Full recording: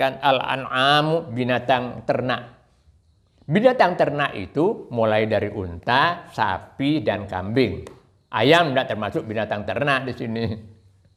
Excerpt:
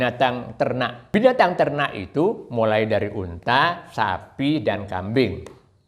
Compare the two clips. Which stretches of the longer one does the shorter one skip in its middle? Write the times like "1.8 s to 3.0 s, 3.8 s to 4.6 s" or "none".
2.5 s to 3.4 s